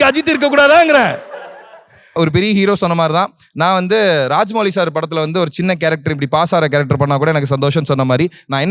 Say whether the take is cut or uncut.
uncut